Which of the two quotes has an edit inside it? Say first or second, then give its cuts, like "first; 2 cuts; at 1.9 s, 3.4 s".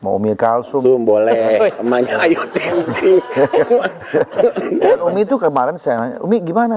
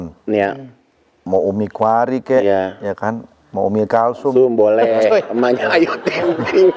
first; 1 cut; at 5.1 s